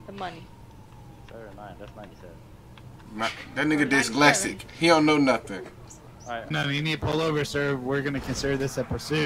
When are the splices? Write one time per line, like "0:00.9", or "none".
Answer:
0:06.5